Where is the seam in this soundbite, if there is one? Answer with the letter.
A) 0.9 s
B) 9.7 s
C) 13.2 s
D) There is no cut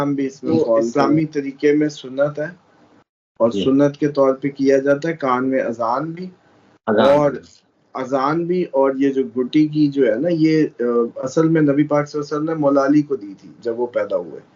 A